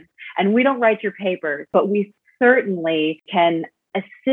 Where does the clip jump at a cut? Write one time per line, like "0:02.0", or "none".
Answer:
0:01.7
0:03.2